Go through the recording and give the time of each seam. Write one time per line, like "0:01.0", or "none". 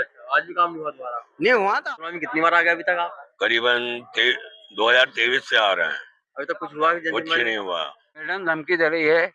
0:01.9
0:08.2